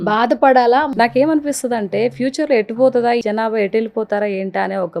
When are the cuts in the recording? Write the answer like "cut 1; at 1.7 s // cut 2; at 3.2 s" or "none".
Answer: cut 1; at 0.9 s // cut 2; at 3.2 s